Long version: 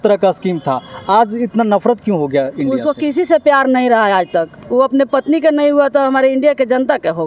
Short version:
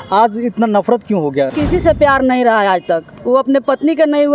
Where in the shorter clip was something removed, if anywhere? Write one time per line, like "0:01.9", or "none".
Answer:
0:01.5